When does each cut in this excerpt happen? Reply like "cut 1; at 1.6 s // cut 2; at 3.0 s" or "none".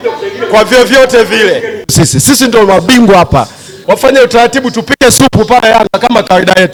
none